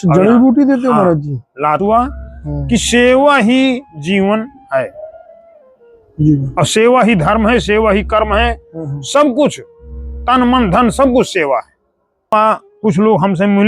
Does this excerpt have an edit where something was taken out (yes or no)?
yes